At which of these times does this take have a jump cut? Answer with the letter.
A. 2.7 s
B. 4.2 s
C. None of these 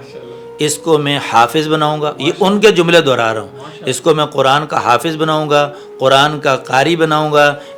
C